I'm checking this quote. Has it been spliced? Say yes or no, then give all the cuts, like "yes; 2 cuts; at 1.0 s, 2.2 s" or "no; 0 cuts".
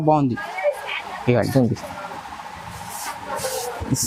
no; 0 cuts